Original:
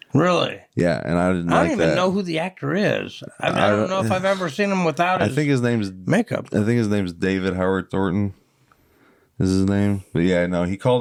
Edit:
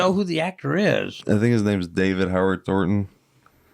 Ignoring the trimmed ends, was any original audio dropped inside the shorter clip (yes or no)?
yes